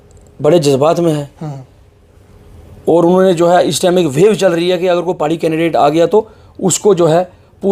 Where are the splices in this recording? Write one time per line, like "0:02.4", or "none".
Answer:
none